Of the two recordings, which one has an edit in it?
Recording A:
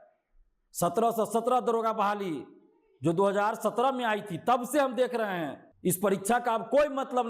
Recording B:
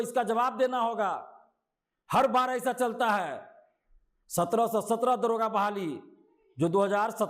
A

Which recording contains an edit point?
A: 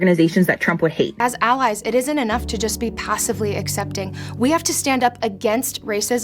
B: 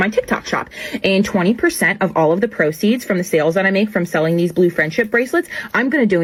A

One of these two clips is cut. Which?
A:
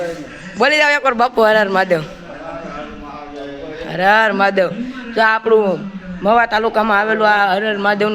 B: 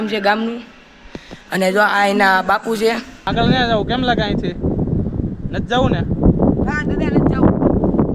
B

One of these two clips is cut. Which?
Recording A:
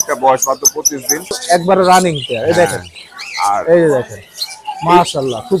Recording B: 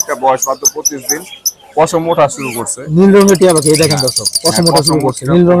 A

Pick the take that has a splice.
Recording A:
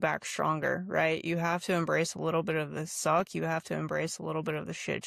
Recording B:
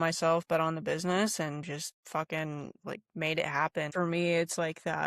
B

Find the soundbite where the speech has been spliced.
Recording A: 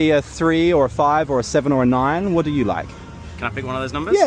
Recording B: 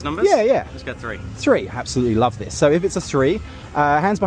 B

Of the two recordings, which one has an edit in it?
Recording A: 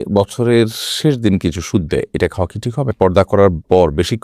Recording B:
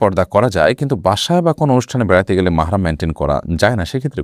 A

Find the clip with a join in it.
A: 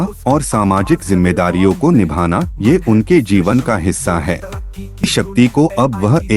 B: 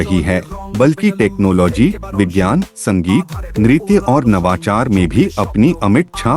A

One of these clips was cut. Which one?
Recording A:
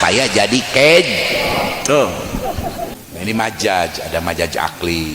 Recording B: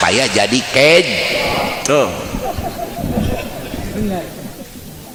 A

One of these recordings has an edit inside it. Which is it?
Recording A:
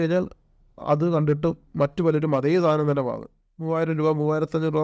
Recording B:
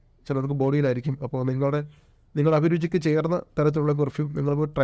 A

